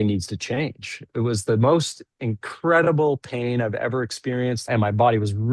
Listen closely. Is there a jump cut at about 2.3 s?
no; 2 cuts; at 1.1 s, 4.7 s

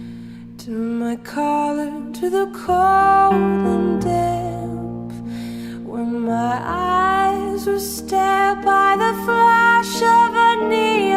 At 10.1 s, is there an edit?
yes; 1 cut; at 10.1 s

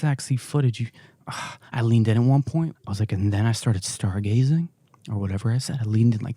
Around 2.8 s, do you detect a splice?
yes; 1 cut; at 2.8 s

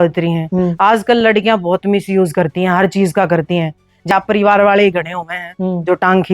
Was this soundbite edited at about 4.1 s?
yes; 1 cut; at 4.1 s

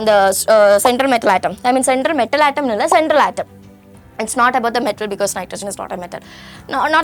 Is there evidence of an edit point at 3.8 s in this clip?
no; 0 cuts

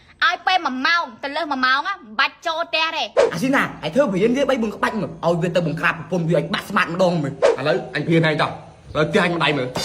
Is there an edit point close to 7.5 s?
yes; 2 cuts; at 3.2 s, 7.5 s

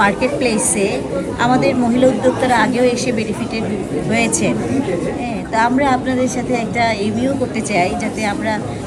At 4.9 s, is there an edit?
no; 0 cuts

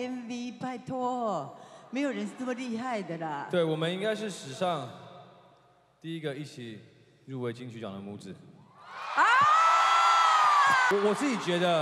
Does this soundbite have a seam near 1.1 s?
no; 1 cut; at 10.9 s

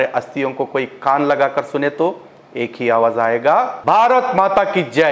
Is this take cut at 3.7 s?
yes; 1 cut; at 3.7 s

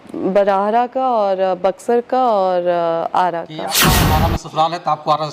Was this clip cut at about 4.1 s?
yes; 1 cut; at 4.1 s

